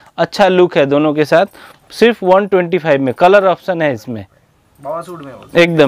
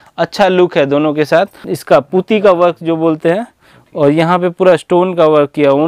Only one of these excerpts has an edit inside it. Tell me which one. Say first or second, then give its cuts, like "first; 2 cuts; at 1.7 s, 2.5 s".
second; 1 cut; at 1.7 s